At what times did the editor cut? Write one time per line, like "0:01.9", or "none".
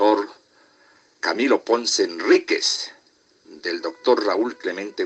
0:01.1

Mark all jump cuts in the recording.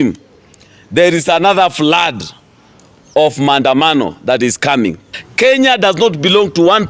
0:05.2

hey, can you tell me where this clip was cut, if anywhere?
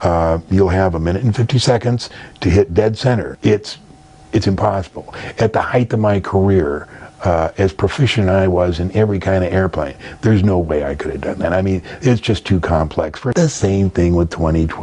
0:03.3
0:13.2

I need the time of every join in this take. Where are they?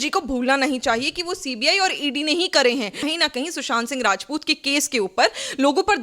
0:03.0

